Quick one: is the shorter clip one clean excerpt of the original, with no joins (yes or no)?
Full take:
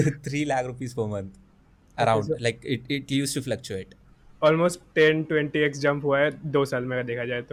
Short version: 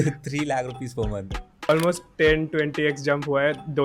no